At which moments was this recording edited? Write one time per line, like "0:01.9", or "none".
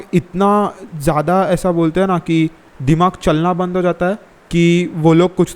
0:02.7
0:04.3

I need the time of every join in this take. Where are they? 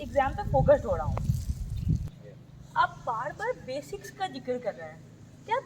0:02.0

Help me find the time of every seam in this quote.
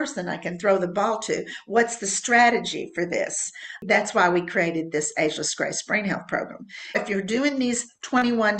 0:03.8
0:07.0

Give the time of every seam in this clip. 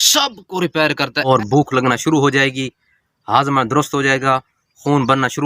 0:01.3

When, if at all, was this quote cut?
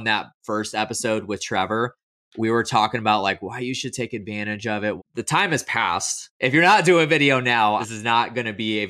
0:05.0
0:06.2
0:07.8

